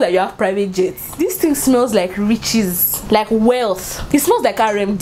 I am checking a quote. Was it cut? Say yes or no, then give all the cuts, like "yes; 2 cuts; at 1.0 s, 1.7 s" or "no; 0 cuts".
yes; 3 cuts; at 1.1 s, 2.9 s, 3.9 s